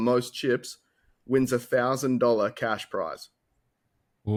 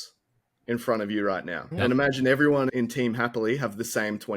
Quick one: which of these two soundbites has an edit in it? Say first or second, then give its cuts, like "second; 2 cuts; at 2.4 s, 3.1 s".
second; 2 cuts; at 1.6 s, 2.7 s